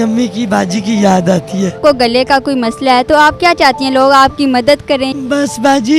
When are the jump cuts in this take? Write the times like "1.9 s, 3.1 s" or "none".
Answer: 1.8 s, 5.1 s

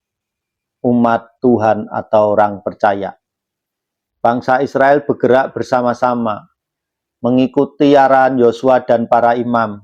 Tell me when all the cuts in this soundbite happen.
none

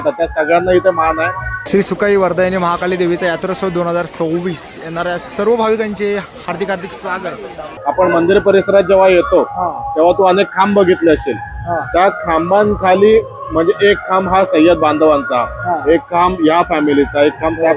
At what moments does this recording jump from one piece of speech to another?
1.5 s, 7.7 s

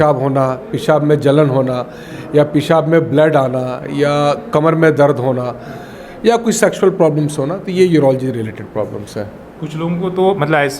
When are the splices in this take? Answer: none

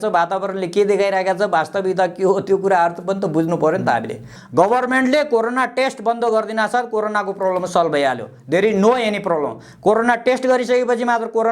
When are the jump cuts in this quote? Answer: 4.4 s

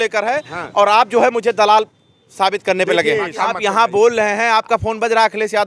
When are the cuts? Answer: 3.3 s

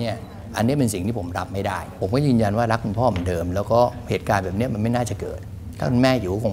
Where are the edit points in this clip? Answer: 1.9 s

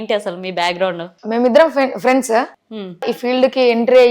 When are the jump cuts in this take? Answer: 3.0 s

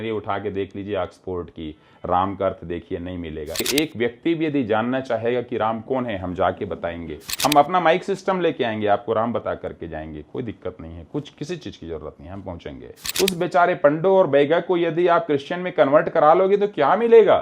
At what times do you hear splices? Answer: 3.7 s, 7.3 s, 13.0 s

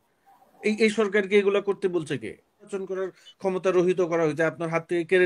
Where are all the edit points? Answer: 2.7 s

